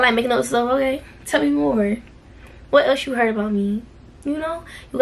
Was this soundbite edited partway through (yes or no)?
no